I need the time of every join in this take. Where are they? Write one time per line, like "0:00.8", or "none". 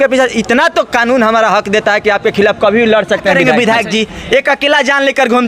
0:03.4

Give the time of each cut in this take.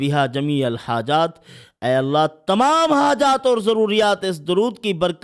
none

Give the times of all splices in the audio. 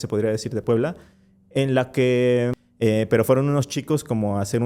0:02.6

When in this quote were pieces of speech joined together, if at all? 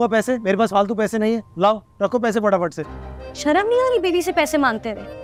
none

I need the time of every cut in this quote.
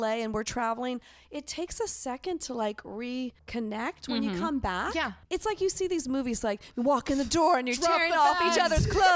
0:05.2

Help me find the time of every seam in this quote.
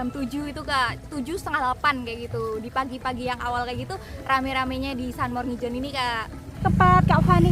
0:06.6

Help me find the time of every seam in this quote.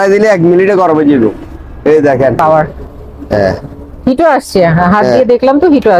0:02.4

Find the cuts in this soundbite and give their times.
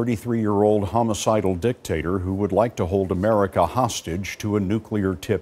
none

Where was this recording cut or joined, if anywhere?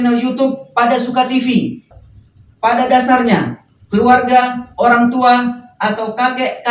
0:01.9

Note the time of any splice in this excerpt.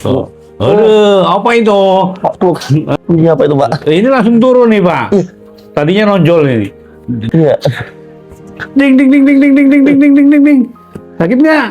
0:02.9
0:07.2

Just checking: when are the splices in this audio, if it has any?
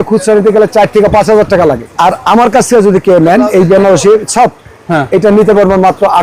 0:01.9

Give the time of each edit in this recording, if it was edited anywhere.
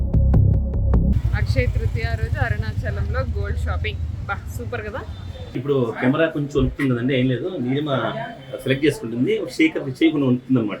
0:01.2
0:05.5

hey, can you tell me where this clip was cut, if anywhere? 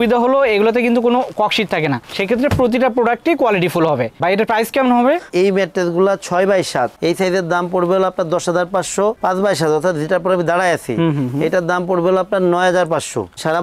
none

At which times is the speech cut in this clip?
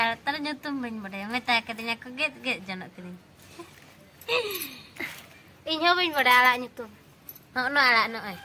none

